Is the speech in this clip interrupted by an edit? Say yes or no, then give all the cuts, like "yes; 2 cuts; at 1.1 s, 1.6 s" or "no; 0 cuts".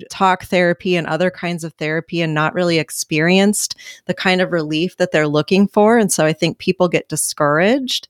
no; 0 cuts